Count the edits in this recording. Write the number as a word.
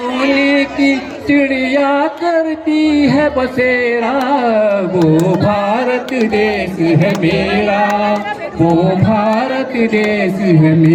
zero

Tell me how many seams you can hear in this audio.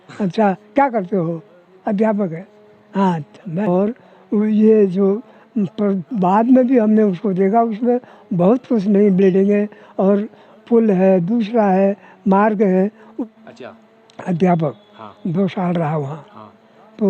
two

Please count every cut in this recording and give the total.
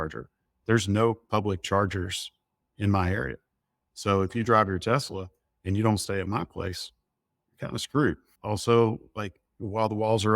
one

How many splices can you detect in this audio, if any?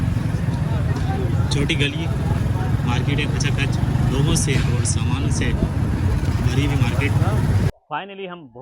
one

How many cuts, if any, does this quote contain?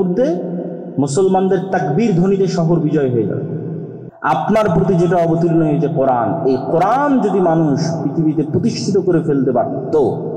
one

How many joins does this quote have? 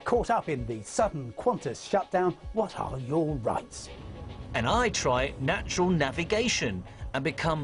zero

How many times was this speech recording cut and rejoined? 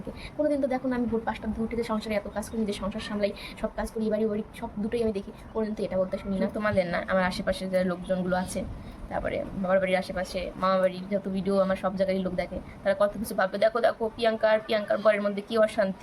one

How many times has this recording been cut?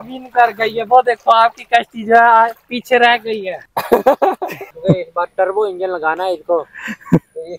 one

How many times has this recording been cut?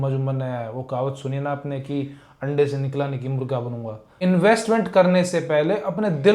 one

